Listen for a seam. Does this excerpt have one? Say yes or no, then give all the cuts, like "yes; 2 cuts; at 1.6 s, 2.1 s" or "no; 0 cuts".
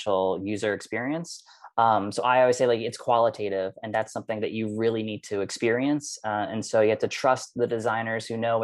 no; 0 cuts